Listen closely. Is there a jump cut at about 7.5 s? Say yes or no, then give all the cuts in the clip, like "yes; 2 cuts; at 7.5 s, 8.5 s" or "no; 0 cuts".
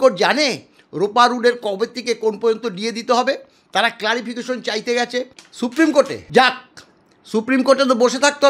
no; 2 cuts; at 5.4 s, 6.2 s